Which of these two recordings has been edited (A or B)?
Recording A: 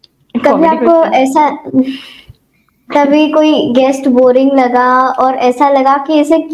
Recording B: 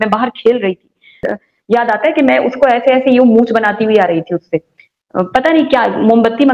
B